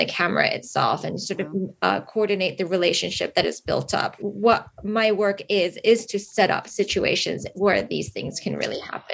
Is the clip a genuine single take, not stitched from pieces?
no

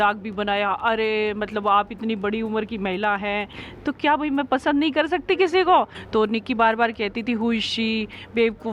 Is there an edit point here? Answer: yes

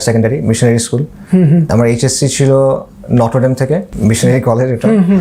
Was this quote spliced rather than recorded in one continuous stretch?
yes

